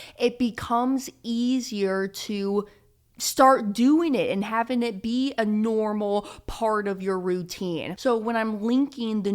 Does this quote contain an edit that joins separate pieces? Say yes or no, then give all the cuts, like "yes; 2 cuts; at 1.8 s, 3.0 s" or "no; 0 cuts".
yes; 1 cut; at 7.9 s